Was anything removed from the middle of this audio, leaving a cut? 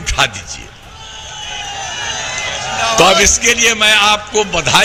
no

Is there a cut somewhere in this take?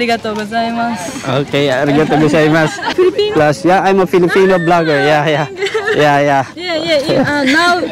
yes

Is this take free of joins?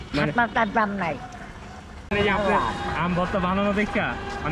no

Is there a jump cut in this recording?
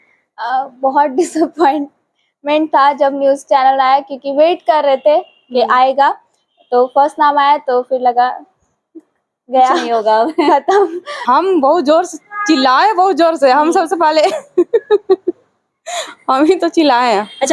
yes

